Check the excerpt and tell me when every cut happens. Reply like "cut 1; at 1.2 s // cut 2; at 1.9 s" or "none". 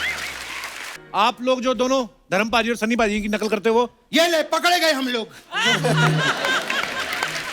cut 1; at 0.9 s